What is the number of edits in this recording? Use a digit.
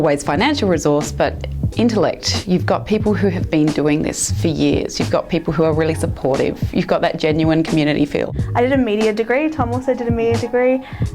1